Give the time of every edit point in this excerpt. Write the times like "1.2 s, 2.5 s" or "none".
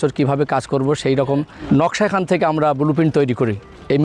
1.6 s